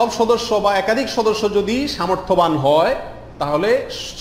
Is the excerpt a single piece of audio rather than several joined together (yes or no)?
yes